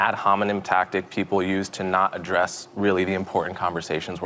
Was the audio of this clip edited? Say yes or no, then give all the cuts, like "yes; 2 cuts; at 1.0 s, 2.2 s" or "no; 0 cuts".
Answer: no; 0 cuts